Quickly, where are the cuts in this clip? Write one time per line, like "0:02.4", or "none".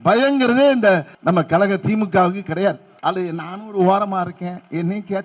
0:01.1
0:02.9